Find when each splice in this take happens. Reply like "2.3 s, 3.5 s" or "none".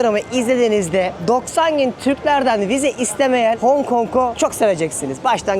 1.2 s, 3.6 s, 4.3 s